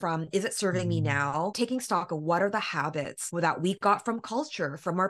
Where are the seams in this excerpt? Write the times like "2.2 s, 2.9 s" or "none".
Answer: 1.5 s